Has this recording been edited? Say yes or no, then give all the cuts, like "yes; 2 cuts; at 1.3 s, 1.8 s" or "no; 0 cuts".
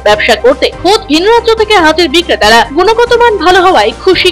no; 0 cuts